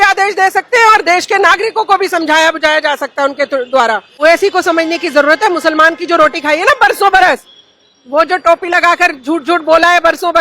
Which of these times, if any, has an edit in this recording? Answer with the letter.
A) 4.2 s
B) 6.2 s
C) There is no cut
A